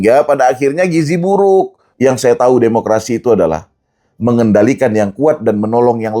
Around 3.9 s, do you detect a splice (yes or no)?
no